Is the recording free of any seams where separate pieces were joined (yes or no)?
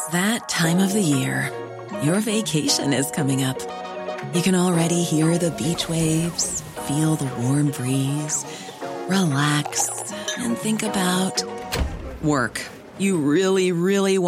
yes